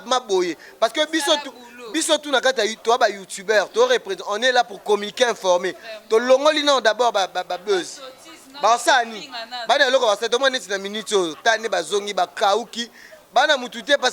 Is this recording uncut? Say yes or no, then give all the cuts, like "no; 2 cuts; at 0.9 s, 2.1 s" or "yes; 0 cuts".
yes; 0 cuts